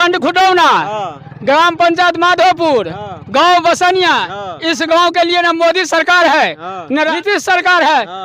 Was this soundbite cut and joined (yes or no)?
yes